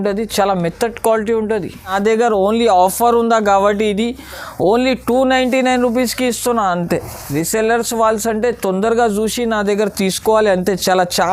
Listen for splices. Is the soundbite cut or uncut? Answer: cut